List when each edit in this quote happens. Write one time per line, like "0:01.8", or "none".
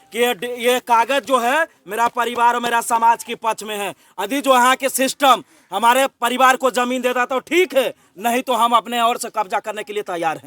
none

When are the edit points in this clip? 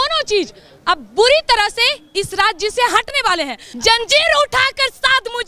0:03.6

